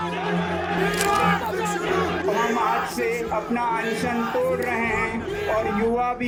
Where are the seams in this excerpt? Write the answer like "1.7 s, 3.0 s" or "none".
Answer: none